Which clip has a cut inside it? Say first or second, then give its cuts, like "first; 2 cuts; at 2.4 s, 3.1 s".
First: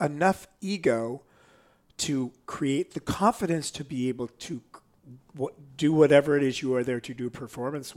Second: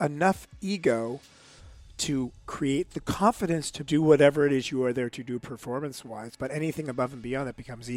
second; 2 cuts; at 3.7 s, 6.3 s